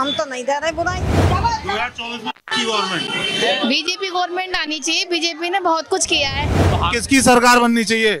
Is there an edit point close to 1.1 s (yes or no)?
yes